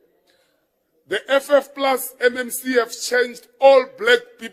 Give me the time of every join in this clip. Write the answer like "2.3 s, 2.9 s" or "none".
none